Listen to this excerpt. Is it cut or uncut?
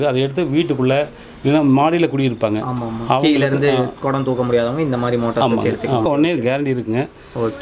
cut